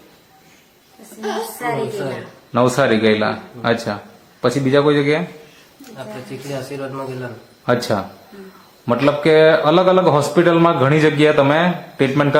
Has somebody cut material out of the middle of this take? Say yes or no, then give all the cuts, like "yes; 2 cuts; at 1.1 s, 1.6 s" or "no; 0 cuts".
no; 0 cuts